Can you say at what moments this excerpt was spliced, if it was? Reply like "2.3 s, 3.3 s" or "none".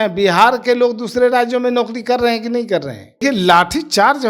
3.2 s